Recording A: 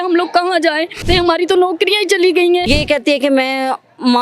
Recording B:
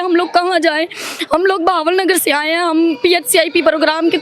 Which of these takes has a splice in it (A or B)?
A